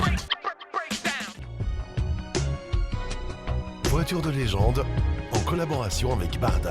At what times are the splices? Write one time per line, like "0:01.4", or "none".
0:01.4

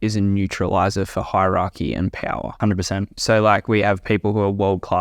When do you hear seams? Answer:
0:02.5

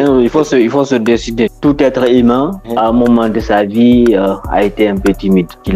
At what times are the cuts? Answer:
0:01.5

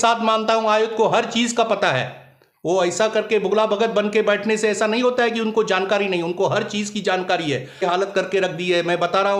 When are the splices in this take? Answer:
0:07.8

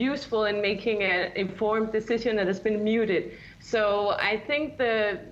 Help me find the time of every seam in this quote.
none

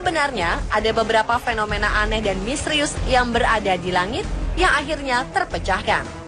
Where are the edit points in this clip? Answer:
none

